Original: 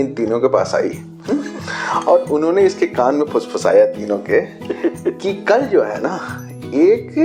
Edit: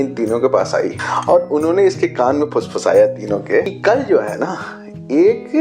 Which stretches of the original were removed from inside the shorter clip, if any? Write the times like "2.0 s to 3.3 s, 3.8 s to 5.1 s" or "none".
1.1 s to 1.8 s, 4.5 s to 5.4 s